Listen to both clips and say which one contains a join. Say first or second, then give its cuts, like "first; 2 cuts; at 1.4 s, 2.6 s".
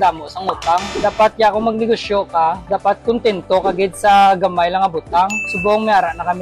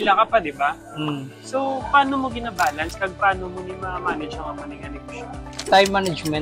first; 2 cuts; at 0.9 s, 5.4 s